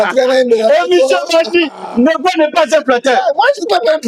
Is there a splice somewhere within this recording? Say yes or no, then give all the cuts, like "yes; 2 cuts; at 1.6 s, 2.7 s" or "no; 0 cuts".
no; 0 cuts